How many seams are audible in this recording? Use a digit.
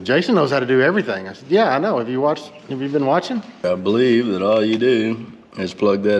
1